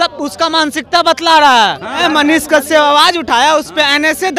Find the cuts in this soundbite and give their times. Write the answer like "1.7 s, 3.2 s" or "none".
2.0 s

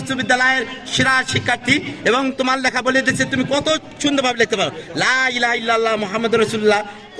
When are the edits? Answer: none

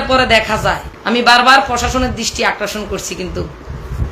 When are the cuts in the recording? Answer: 0.9 s

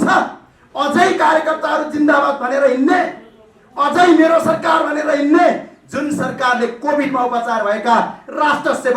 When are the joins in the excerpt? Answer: none

